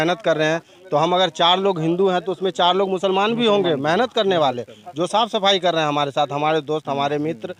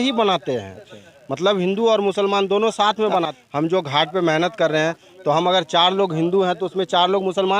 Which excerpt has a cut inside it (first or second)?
second